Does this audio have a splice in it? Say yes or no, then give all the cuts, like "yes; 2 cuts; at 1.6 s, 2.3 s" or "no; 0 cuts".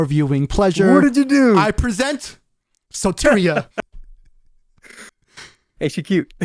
no; 0 cuts